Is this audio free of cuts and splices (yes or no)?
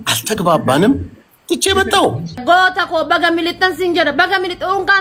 yes